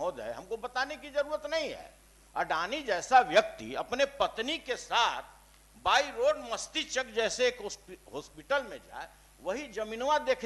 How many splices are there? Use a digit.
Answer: 0